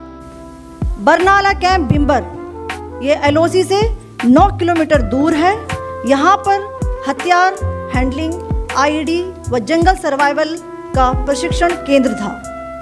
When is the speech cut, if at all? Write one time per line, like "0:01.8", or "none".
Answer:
0:01.0